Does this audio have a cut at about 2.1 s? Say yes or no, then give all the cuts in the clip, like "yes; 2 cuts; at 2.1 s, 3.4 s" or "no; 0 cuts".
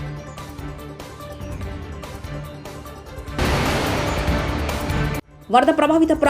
yes; 2 cuts; at 1.3 s, 2.1 s